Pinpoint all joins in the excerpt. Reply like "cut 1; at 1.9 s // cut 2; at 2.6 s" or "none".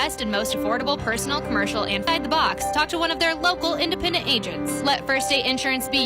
cut 1; at 2.1 s